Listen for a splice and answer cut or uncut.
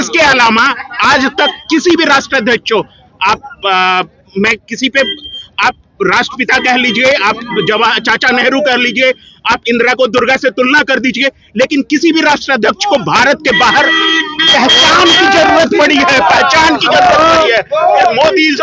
uncut